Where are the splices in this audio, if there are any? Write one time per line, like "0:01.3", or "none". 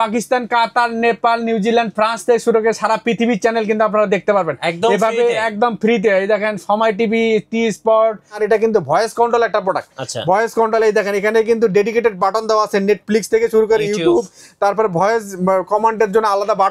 0:08.4